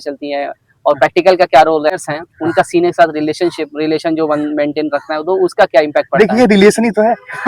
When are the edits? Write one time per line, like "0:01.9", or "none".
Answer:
0:02.0